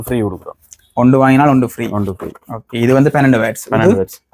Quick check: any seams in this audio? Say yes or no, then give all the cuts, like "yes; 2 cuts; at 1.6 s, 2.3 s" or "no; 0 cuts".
no; 0 cuts